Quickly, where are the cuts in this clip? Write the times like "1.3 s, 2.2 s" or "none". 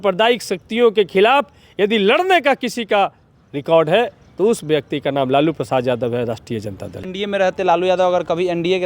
7.3 s